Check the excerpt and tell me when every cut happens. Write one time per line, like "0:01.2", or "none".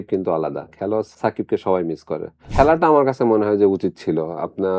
0:01.1
0:02.4